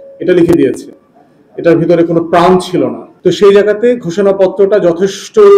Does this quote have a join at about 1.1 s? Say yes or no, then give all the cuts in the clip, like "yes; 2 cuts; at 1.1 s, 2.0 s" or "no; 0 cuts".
no; 1 cut; at 3.1 s